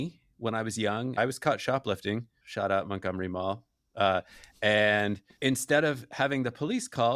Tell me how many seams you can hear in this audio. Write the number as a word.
two